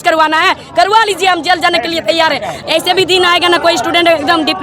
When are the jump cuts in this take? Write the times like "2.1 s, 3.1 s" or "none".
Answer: 2.5 s